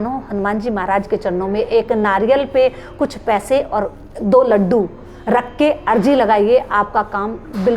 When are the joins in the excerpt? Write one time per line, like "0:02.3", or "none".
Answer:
none